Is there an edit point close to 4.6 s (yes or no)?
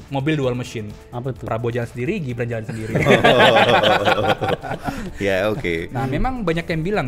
no